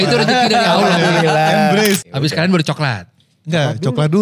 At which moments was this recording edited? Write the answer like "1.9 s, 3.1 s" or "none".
2.0 s